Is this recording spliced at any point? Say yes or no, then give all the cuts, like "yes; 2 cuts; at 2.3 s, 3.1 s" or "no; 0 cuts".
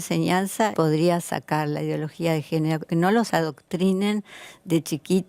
yes; 2 cuts; at 0.7 s, 2.9 s